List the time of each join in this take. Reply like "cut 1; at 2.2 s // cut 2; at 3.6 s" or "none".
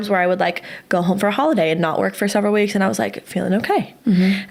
none

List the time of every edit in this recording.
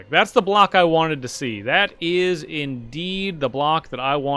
none

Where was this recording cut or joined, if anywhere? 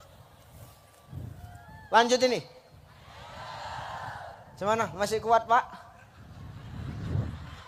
none

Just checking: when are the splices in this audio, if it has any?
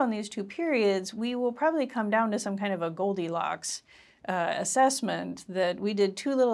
none

